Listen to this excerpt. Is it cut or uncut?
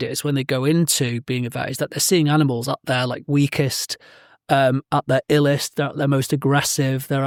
uncut